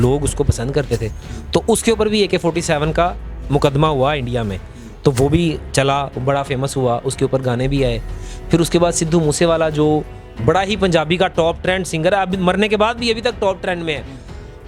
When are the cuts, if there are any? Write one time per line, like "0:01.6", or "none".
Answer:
none